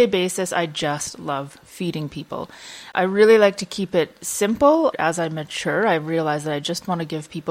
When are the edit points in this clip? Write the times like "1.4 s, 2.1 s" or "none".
2.9 s, 4.9 s